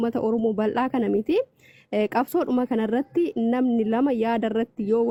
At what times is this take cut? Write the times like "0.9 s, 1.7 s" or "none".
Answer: none